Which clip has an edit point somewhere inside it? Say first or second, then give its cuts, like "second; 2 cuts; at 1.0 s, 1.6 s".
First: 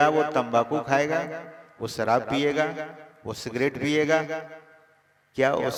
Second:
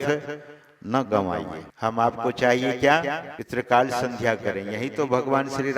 second; 2 cuts; at 1.6 s, 3.3 s